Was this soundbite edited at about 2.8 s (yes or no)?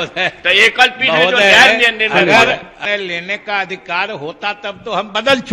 yes